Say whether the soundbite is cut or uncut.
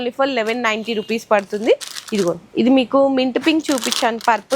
uncut